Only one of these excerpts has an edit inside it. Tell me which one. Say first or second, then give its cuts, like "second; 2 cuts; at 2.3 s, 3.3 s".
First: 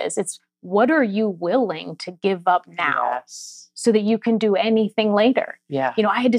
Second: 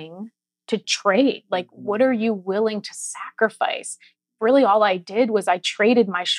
second; 2 cuts; at 0.9 s, 4.1 s